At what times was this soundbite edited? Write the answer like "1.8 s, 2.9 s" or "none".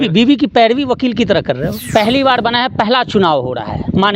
1.8 s